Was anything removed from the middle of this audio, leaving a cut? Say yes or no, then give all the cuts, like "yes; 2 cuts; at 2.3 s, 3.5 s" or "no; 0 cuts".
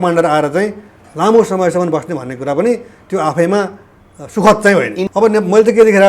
yes; 1 cut; at 5.1 s